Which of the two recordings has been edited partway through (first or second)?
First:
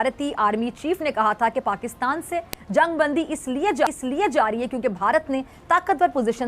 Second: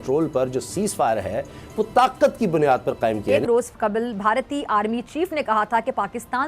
second